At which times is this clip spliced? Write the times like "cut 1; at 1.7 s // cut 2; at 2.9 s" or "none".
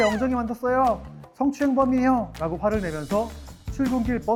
none